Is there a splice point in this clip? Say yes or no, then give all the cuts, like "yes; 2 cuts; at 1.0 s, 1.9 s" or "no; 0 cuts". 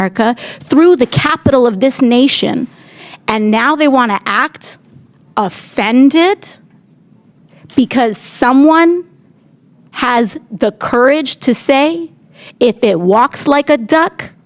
no; 0 cuts